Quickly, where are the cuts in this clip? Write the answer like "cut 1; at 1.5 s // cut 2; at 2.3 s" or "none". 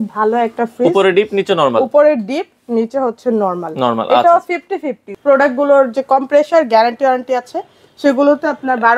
cut 1; at 5.0 s